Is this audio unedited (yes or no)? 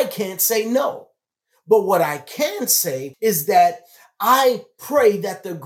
no